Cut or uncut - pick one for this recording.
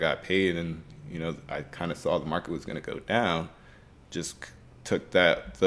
uncut